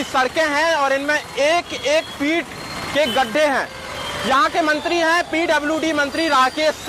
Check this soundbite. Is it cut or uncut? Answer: uncut